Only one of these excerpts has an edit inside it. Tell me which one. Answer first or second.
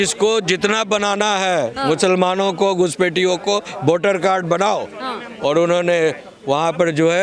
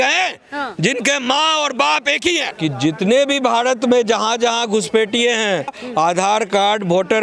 second